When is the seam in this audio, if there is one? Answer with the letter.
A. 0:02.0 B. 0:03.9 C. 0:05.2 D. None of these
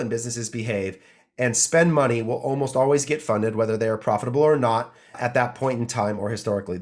C